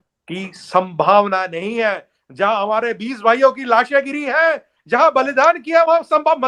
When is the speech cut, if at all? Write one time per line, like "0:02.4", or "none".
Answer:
none